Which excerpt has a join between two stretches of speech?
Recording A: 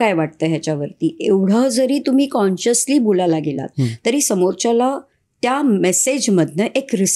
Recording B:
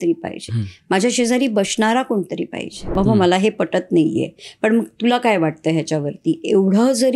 B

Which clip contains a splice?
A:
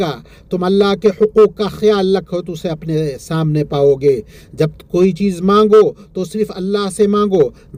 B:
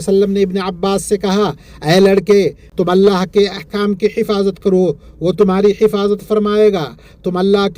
B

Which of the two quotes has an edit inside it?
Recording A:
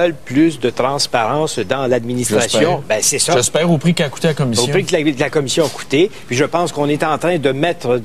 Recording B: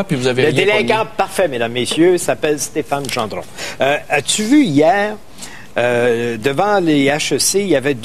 B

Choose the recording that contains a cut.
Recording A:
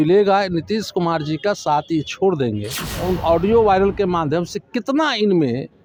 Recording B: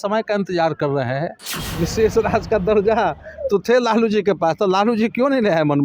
B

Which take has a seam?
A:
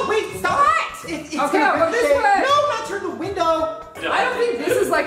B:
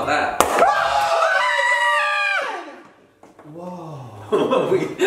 A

